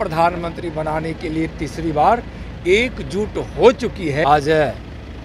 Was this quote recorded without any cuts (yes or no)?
no